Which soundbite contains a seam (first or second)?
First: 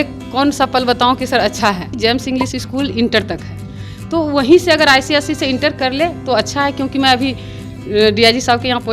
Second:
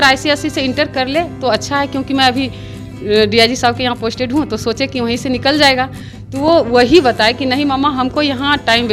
first